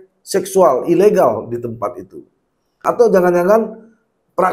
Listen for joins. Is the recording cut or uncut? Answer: cut